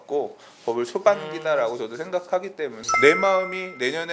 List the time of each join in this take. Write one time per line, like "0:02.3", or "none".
0:02.9